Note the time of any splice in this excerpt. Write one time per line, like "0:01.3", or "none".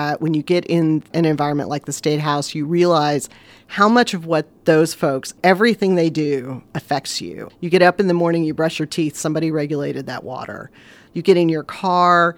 0:01.1
0:04.5
0:05.3
0:07.3
0:11.0